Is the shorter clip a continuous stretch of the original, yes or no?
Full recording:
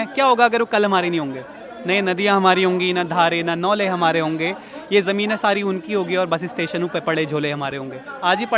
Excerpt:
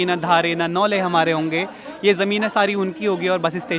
yes